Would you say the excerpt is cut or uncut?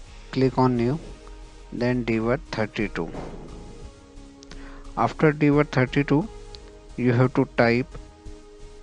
cut